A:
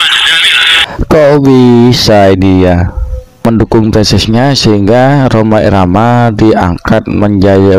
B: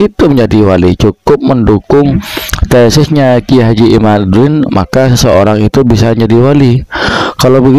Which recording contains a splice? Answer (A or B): A